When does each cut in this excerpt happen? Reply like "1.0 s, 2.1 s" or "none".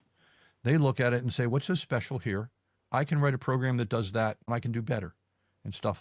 4.5 s